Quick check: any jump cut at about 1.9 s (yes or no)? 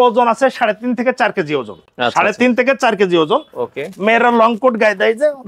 no